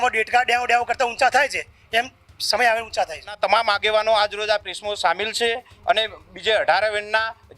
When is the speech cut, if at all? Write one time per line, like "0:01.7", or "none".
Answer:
0:03.4